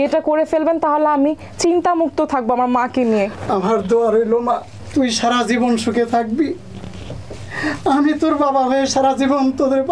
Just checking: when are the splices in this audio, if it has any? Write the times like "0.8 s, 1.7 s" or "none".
none